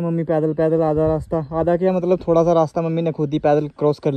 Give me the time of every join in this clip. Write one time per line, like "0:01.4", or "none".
none